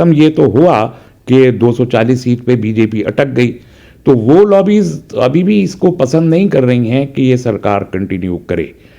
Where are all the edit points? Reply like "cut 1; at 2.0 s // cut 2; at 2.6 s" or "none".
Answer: none